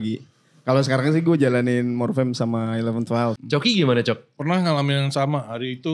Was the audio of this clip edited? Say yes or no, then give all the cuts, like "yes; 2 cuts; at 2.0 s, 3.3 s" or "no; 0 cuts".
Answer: yes; 1 cut; at 3.4 s